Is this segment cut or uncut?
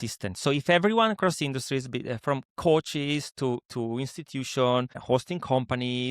cut